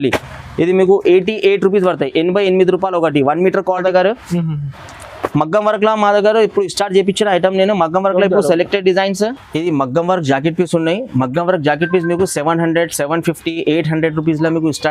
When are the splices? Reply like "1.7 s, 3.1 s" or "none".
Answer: 3.8 s